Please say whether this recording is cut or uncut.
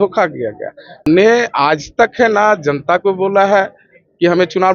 cut